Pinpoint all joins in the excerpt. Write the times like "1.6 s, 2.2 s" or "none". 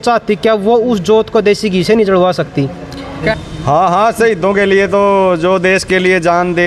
3.3 s